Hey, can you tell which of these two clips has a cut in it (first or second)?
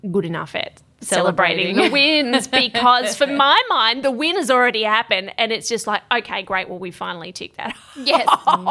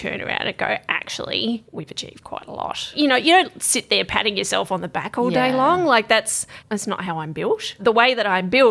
second